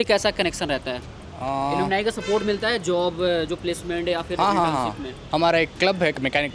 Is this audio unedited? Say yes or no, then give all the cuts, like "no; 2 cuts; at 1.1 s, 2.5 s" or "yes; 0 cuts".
yes; 0 cuts